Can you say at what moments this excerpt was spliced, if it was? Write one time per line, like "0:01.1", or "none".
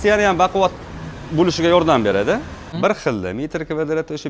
0:02.7